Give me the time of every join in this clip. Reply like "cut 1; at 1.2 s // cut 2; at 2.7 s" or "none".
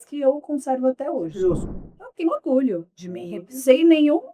cut 1; at 1.6 s

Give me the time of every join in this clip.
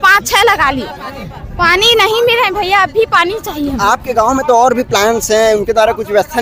none

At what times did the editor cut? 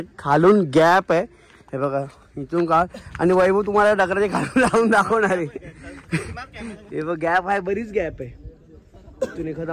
none

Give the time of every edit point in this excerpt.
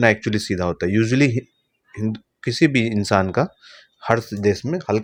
none

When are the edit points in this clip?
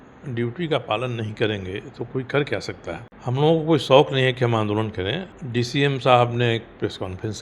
cut 1; at 3.1 s // cut 2; at 5.3 s

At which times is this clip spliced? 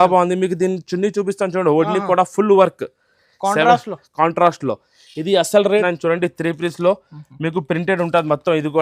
cut 1; at 5.8 s

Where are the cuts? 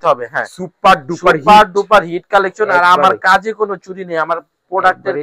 none

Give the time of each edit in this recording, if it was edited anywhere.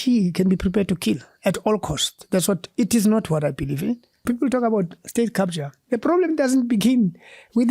cut 1; at 4.1 s

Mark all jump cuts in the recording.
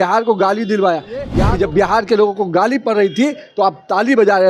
cut 1; at 1.4 s

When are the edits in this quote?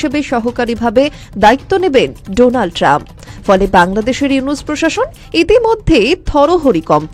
none

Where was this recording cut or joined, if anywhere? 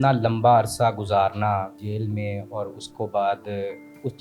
cut 1; at 1.8 s

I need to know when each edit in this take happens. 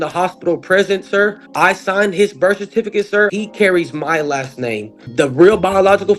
cut 1; at 1.4 s // cut 2; at 3.3 s // cut 3; at 5.0 s

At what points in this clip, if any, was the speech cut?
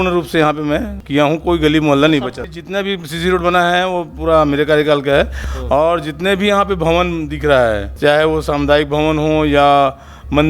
cut 1; at 1.0 s // cut 2; at 2.4 s // cut 3; at 5.4 s // cut 4; at 7.9 s

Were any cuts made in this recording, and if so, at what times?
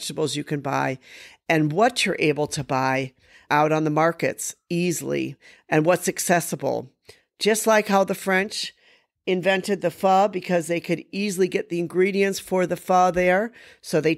none

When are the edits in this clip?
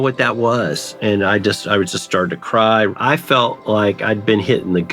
cut 1; at 0.9 s // cut 2; at 2.9 s

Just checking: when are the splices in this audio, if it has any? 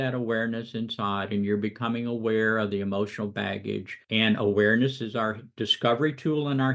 cut 1; at 3.9 s

